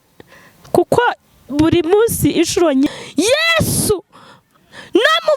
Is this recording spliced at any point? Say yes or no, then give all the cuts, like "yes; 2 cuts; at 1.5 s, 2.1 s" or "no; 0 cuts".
yes; 1 cut; at 2.9 s